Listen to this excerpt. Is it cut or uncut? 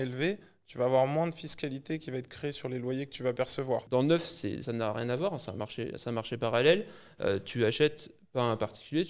cut